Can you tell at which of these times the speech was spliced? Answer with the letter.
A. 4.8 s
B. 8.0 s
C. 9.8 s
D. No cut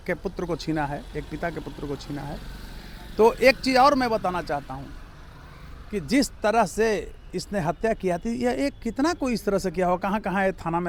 D